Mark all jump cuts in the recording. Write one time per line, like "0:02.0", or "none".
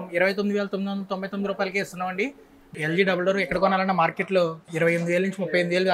0:02.7
0:04.6

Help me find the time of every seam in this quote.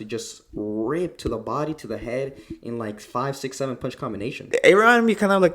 0:04.5

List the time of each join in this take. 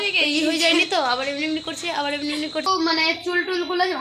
0:02.7

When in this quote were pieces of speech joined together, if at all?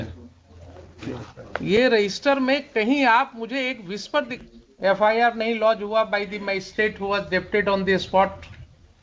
0:04.3

